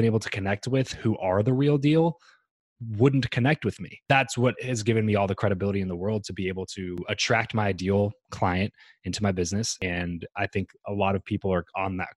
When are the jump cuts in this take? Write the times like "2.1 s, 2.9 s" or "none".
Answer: 3.9 s, 7.0 s, 9.7 s